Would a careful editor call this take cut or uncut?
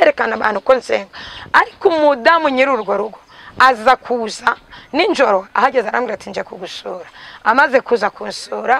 uncut